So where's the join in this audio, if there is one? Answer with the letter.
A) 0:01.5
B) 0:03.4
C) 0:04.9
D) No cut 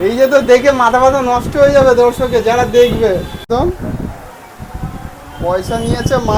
B